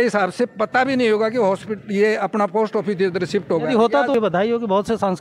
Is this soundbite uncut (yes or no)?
no